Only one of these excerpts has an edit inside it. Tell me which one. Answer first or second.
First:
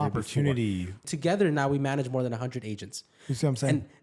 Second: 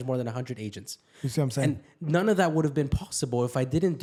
first